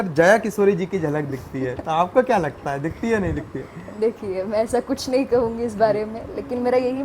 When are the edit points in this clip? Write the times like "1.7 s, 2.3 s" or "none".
none

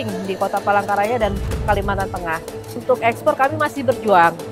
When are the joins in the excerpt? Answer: 2.8 s

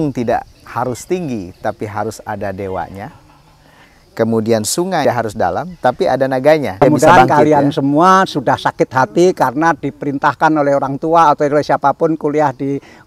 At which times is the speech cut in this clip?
5.0 s, 6.8 s

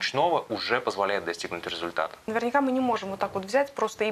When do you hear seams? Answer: 2.3 s

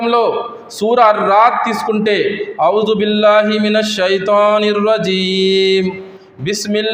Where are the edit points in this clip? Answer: none

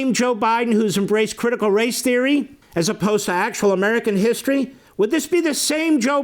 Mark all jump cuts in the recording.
2.6 s, 4.8 s

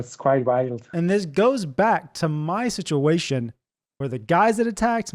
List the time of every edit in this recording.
0.9 s

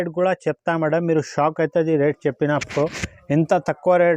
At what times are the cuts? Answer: none

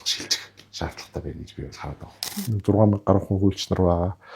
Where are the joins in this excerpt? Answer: 2.4 s

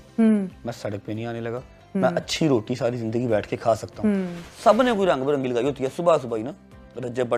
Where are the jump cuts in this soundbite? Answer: 4.4 s

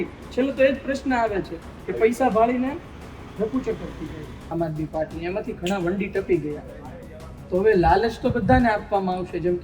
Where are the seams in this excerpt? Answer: 4.5 s

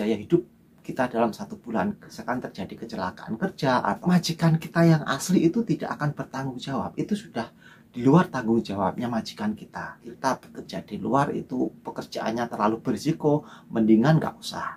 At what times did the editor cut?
2.2 s, 4.0 s, 10.0 s

